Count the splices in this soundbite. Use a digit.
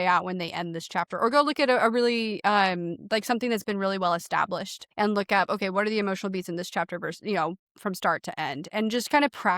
1